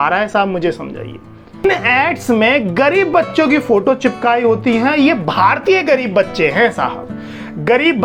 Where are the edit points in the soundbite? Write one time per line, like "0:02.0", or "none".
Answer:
0:01.6